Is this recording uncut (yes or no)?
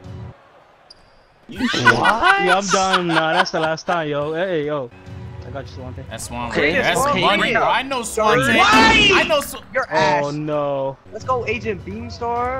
yes